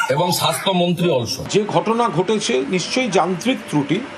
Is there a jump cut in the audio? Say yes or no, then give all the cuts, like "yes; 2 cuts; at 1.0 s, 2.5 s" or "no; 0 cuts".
yes; 1 cut; at 1.4 s